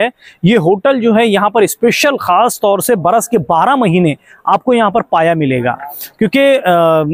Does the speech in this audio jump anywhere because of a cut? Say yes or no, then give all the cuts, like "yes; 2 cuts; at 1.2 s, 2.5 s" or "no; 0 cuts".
no; 0 cuts